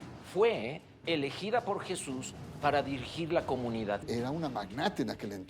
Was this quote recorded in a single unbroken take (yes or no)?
no